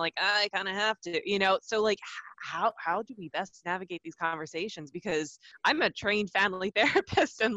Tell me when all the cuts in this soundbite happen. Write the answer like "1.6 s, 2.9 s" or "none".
5.4 s